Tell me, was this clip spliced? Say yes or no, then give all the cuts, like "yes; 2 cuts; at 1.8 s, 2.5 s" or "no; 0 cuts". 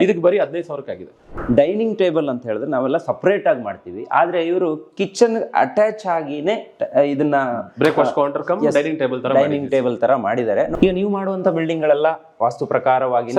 yes; 2 cuts; at 1.3 s, 10.7 s